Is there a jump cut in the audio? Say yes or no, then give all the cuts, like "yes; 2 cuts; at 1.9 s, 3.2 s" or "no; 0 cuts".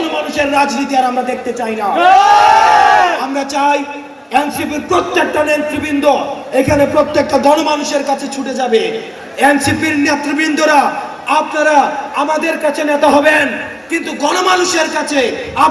no; 0 cuts